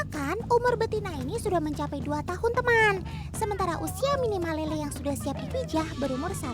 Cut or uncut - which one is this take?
uncut